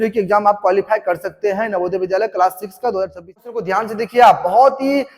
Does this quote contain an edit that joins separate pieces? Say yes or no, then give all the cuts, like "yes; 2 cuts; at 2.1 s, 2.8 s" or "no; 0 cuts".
yes; 1 cut; at 3.6 s